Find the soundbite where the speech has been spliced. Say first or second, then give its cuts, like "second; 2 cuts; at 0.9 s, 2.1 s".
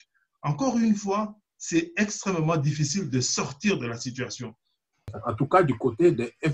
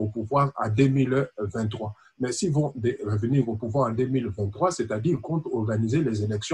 first; 1 cut; at 5.1 s